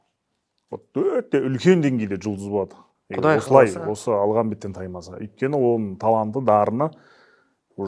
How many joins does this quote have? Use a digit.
0